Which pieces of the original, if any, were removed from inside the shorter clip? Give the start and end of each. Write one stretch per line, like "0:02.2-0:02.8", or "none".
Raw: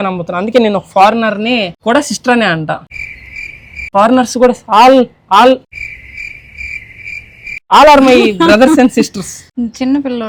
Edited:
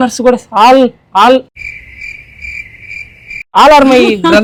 none